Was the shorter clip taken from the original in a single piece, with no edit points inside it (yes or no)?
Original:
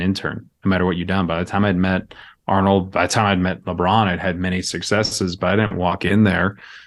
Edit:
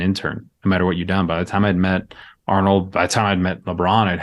yes